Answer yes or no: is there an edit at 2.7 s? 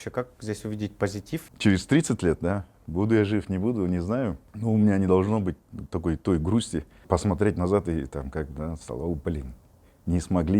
no